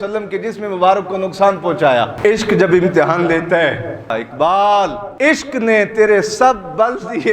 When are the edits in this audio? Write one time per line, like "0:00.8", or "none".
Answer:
0:02.1
0:04.1
0:05.0